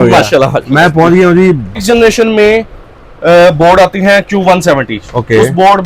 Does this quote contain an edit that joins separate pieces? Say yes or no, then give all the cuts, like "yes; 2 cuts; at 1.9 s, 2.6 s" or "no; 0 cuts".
yes; 1 cut; at 1.8 s